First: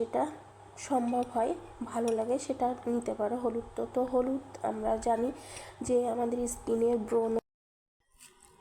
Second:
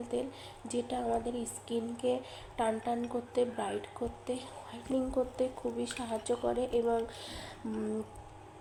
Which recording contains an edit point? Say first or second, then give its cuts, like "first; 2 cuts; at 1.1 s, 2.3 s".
first; 1 cut; at 7.4 s